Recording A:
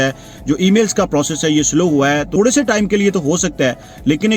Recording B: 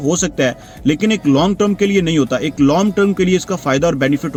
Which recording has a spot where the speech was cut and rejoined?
A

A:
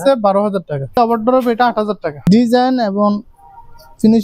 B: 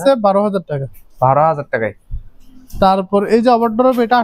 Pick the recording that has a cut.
A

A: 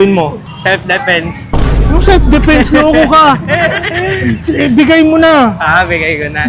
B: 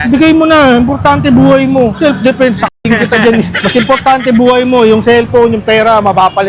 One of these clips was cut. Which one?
B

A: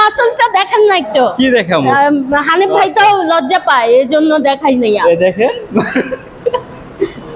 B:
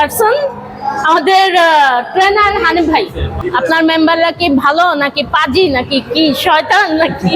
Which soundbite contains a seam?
B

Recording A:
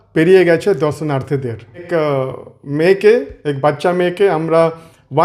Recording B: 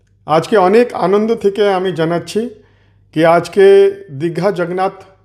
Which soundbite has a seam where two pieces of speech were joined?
A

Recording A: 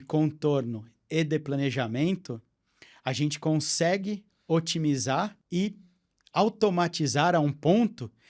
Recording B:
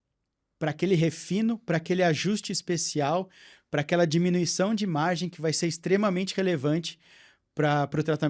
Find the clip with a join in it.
A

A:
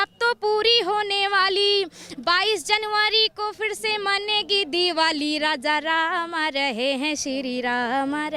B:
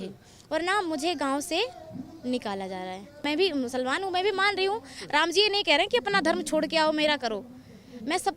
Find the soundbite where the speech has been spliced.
B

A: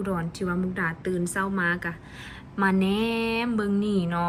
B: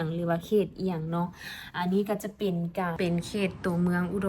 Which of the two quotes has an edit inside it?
B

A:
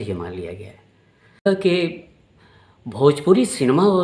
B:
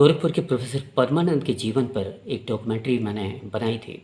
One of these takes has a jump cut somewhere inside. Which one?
A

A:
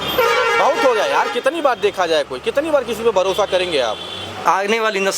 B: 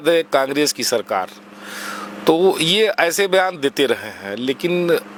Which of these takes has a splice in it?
A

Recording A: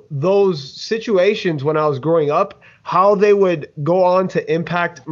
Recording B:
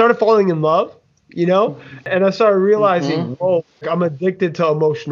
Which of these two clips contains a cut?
B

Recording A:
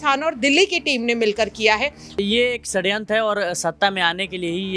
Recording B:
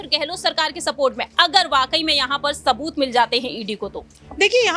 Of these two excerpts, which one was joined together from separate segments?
A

